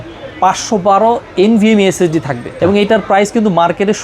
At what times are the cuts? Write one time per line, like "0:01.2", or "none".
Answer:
0:02.5